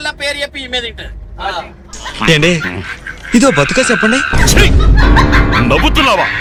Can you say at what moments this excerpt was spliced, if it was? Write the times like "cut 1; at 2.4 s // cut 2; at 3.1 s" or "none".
none